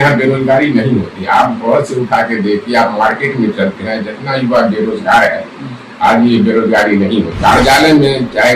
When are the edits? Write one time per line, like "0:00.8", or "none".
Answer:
0:07.3